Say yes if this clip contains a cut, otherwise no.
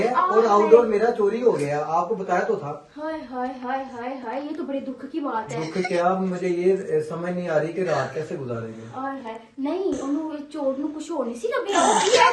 no